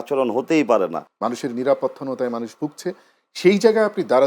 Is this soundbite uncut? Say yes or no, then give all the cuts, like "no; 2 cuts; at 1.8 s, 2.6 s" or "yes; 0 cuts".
no; 1 cut; at 1.1 s